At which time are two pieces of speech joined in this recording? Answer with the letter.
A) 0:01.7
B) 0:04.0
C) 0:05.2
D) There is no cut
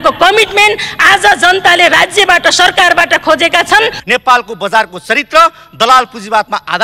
B